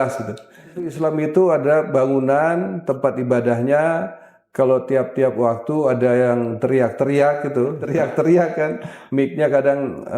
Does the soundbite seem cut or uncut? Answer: cut